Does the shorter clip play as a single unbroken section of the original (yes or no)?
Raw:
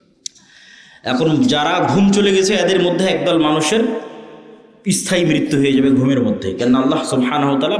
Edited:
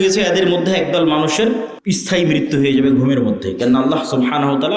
no